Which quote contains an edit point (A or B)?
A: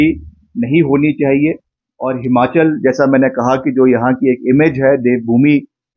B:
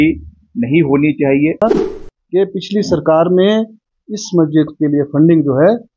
B